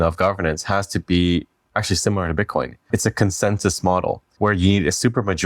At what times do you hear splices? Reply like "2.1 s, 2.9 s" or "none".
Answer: 2.9 s, 4.3 s